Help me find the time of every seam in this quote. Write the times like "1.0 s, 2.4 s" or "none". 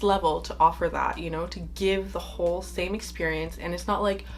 none